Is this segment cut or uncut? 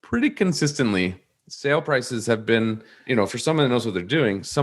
cut